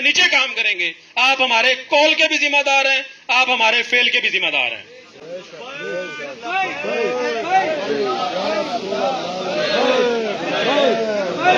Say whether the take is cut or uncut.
uncut